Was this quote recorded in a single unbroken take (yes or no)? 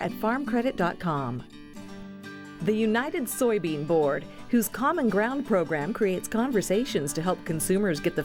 yes